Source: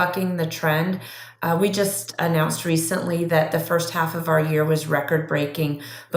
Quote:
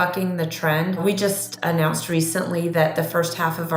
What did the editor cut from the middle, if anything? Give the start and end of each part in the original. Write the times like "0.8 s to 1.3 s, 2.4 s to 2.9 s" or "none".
1.0 s to 1.6 s